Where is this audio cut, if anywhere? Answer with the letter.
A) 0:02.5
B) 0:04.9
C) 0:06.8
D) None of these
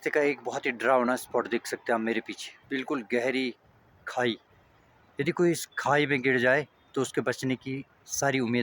D